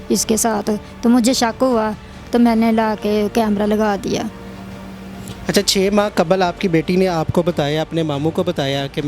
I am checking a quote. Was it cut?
no; 0 cuts

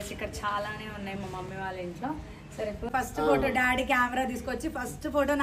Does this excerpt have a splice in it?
yes; 1 cut; at 2.9 s

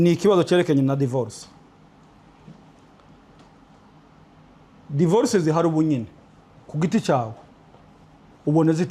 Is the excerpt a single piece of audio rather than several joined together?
yes; 0 cuts

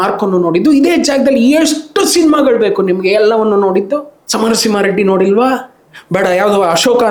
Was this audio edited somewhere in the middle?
no; 0 cuts

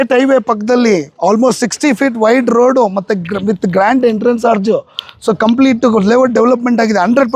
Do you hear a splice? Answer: no; 0 cuts

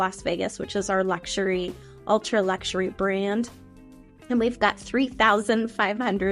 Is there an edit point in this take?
no; 0 cuts

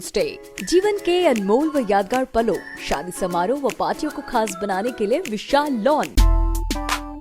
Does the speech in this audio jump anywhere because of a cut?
yes; 1 cut; at 6.2 s

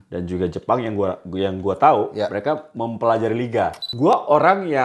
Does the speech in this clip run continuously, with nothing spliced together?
no; 1 cut; at 3.9 s

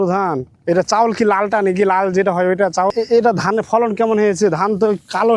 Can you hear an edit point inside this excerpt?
yes; 1 cut; at 2.9 s

